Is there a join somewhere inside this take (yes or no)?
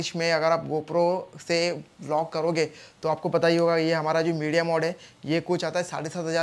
no